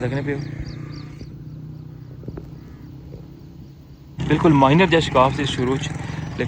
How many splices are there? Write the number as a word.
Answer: one